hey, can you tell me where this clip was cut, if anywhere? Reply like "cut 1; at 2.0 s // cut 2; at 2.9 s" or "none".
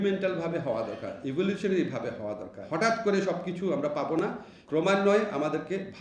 cut 1; at 2.6 s // cut 2; at 4.5 s